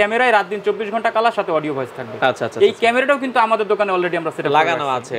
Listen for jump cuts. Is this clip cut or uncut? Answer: uncut